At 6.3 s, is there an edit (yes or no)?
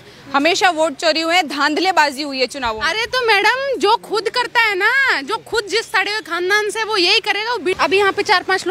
no